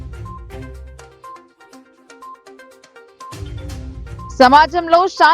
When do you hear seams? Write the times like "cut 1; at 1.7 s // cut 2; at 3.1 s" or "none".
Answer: cut 1; at 4.3 s